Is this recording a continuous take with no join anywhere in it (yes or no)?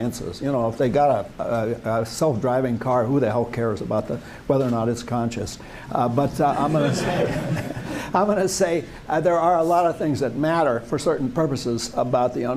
no